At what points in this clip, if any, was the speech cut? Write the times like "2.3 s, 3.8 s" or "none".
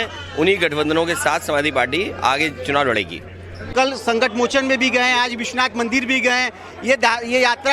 3.7 s